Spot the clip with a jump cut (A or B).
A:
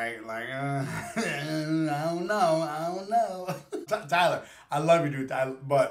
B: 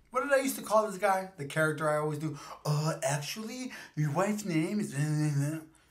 A